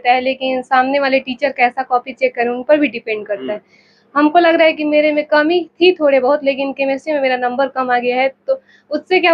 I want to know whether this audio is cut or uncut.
uncut